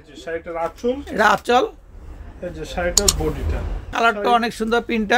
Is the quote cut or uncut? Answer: cut